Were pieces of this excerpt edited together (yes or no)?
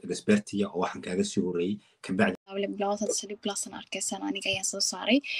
yes